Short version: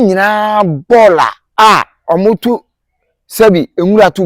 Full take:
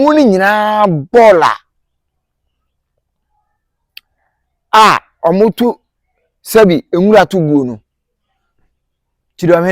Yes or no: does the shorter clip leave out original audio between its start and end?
yes